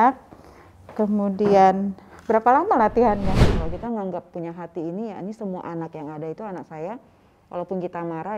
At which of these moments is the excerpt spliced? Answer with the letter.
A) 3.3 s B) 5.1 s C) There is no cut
A